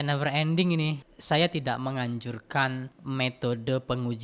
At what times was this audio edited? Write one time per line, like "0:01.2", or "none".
0:01.0
0:02.9